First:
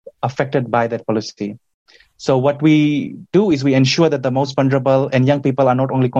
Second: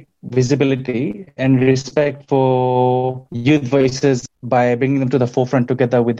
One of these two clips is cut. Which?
second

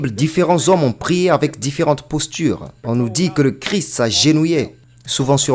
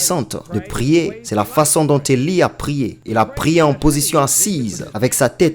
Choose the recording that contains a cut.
first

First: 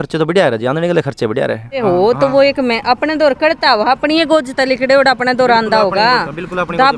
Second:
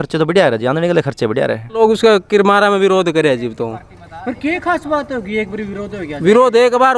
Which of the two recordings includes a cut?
second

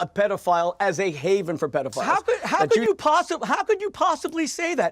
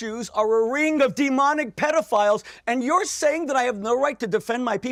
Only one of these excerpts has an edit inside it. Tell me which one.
first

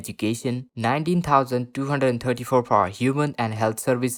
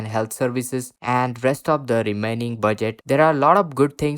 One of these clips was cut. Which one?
second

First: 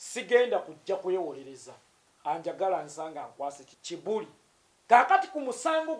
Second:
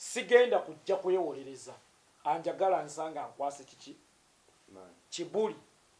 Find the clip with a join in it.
first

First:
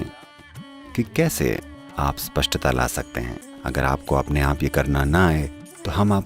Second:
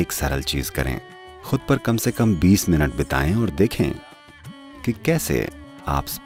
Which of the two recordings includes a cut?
first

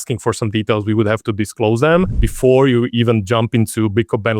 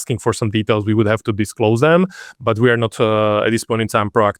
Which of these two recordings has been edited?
first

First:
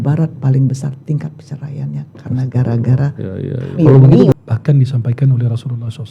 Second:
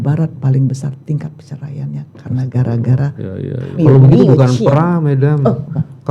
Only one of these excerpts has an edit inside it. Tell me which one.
first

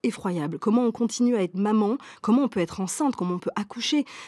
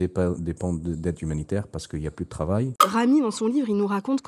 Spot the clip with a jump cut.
second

